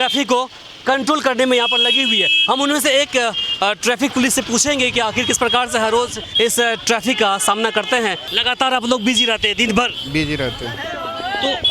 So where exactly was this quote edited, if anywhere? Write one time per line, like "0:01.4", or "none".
0:06.2
0:08.3